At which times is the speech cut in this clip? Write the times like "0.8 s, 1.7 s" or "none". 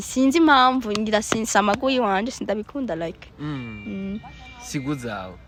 none